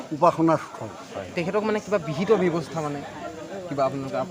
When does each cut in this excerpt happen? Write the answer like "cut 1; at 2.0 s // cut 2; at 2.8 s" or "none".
cut 1; at 1.3 s

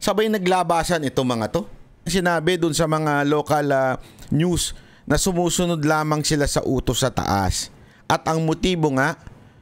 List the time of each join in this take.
cut 1; at 2.1 s

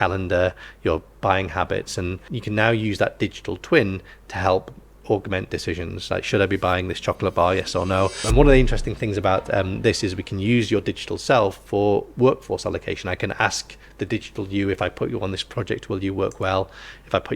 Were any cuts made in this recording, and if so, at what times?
cut 1; at 2.3 s // cut 2; at 8.2 s

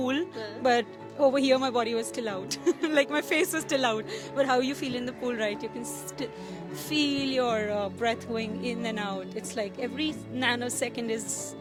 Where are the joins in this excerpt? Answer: none

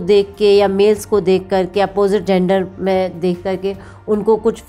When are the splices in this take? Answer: none

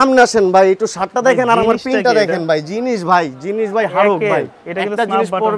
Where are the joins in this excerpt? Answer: none

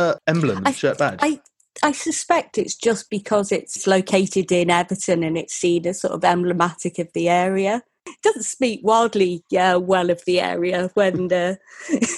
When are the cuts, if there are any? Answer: none

